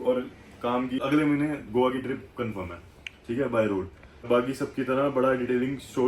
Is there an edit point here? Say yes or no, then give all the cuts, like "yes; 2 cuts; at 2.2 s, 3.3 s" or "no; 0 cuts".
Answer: yes; 2 cuts; at 1.0 s, 4.3 s